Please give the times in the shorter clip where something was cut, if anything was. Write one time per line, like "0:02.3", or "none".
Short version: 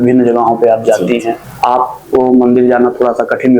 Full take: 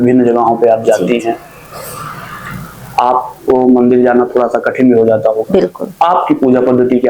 0:01.5